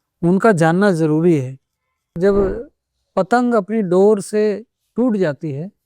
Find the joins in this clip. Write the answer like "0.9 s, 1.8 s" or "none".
2.1 s